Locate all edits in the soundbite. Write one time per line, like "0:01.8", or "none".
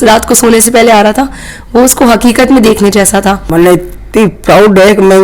0:03.4